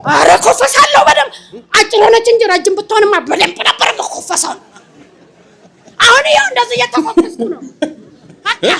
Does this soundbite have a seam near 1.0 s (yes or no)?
no